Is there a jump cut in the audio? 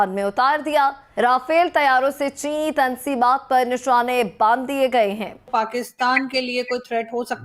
yes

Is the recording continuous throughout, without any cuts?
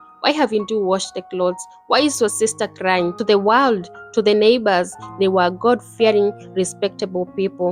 no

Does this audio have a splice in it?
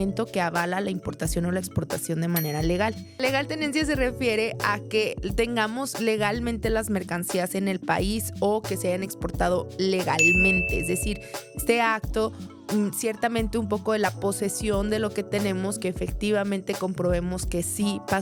no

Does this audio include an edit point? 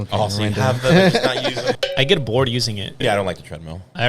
yes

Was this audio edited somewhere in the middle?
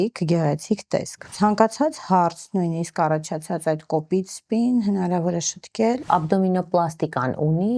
yes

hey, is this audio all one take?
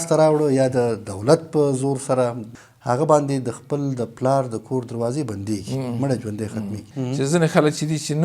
no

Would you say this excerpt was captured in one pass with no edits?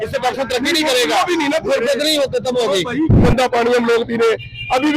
no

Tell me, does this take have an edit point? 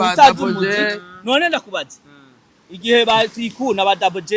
no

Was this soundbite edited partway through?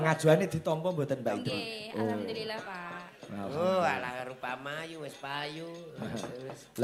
no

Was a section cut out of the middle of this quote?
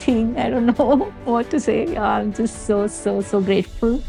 no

